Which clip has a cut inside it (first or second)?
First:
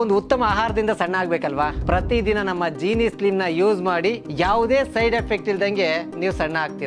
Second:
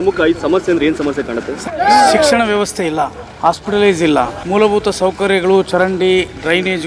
second